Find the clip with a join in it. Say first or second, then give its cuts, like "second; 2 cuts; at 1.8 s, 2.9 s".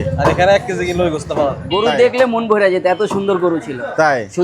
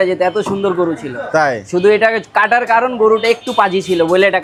first; 1 cut; at 1.6 s